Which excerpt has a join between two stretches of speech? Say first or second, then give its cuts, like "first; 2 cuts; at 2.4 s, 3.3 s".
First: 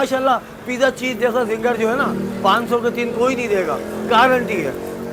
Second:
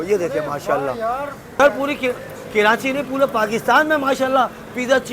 second; 1 cut; at 1.6 s